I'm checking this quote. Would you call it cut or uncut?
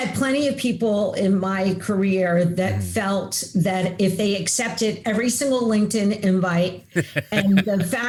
uncut